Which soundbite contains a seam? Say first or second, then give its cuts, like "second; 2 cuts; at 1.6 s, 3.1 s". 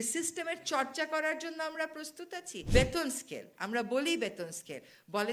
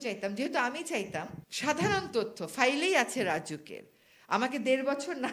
first; 1 cut; at 2.5 s